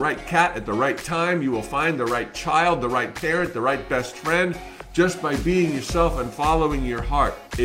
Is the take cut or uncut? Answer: uncut